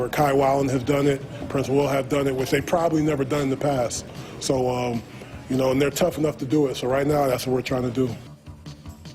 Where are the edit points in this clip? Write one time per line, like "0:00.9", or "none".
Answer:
0:08.2